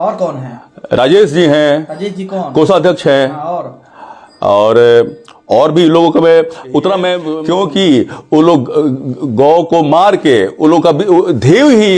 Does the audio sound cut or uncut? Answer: cut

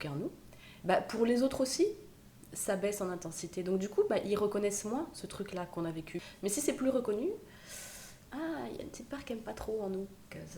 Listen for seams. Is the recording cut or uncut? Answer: cut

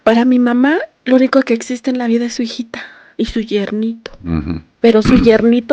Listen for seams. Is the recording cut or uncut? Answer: cut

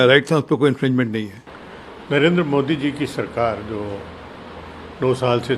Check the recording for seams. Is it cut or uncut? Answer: uncut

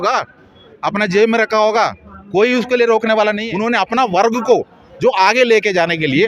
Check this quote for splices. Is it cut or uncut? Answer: cut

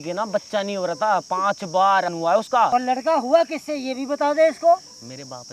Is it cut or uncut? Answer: cut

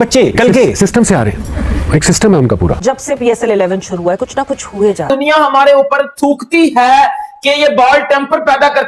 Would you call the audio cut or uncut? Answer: cut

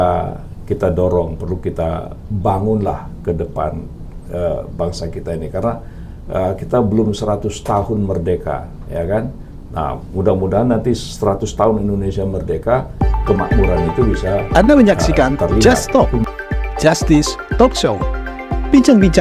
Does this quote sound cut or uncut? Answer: cut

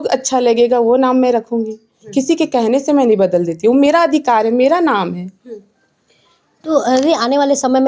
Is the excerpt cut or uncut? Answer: uncut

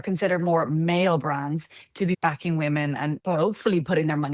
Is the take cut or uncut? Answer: cut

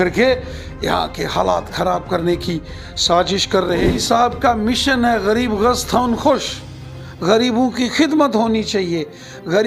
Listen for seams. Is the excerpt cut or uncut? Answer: cut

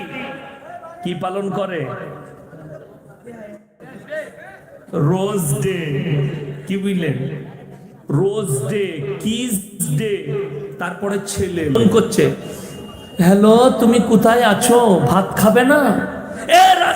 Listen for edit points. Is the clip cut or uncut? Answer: cut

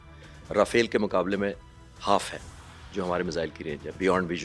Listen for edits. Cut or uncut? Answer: uncut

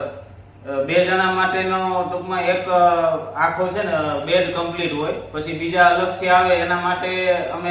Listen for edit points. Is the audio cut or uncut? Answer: uncut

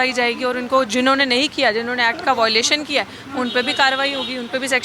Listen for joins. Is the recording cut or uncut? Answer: uncut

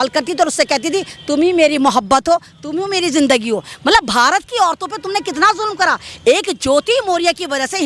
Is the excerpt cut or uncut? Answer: uncut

